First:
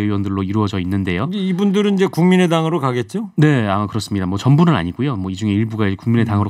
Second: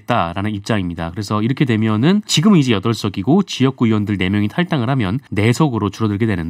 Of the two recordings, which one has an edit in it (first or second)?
second